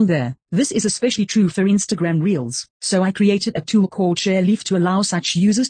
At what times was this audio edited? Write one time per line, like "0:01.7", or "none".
none